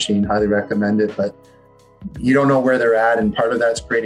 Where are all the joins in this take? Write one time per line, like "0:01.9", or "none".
none